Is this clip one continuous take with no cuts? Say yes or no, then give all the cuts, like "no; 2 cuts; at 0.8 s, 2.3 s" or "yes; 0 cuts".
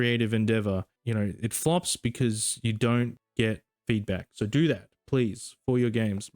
no; 2 cuts; at 0.9 s, 3.7 s